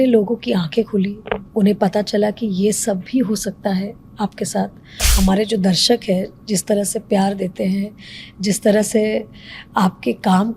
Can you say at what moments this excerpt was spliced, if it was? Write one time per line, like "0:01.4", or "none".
0:05.0

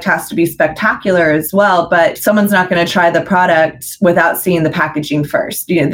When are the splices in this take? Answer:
0:02.2

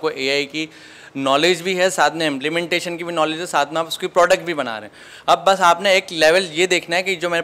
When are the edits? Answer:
none

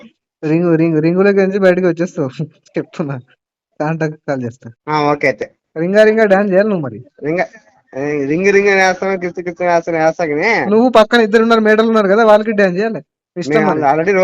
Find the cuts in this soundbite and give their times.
0:04.7

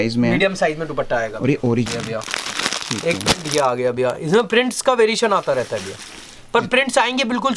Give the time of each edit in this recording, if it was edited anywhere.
0:01.9

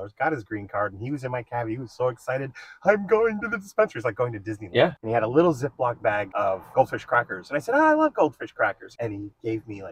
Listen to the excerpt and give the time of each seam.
0:05.0
0:06.5
0:08.9

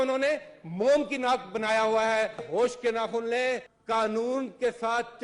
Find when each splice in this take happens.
0:02.5
0:03.7

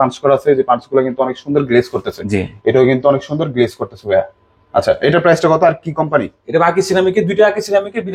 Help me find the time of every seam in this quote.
none

